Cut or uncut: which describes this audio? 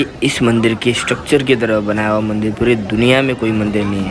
uncut